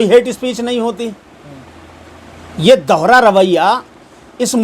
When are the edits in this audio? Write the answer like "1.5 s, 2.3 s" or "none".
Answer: none